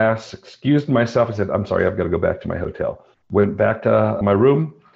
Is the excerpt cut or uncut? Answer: cut